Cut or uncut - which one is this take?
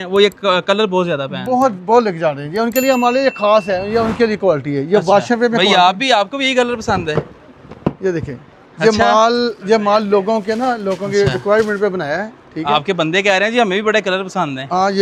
uncut